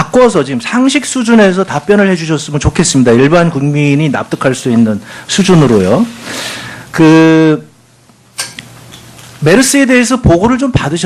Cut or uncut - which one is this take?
cut